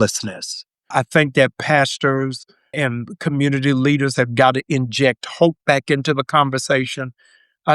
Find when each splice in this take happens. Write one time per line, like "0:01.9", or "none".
0:00.9
0:02.8